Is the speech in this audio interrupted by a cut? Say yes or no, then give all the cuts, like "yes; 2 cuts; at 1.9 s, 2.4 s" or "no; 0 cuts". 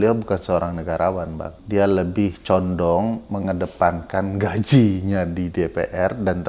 yes; 1 cut; at 1.5 s